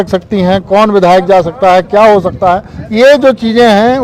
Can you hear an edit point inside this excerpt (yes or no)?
no